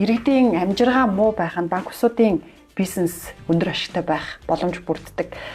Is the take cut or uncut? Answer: uncut